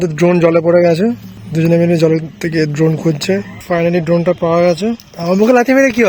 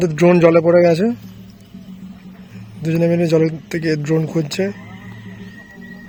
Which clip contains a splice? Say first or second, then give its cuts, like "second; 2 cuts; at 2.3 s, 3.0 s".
first; 3 cuts; at 1.3 s, 3.5 s, 5.1 s